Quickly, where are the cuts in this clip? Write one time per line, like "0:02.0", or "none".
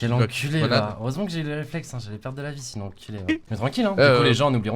0:03.5

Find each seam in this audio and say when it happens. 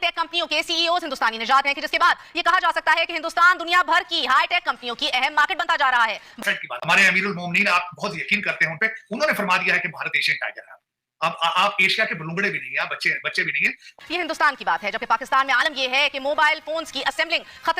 0:06.4
0:13.9

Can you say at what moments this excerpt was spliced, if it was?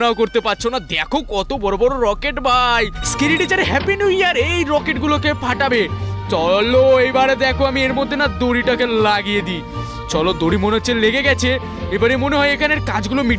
0:03.0

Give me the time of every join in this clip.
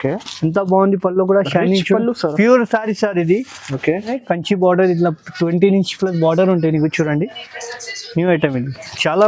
0:04.1

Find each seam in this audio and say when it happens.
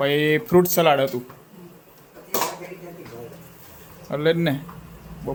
none

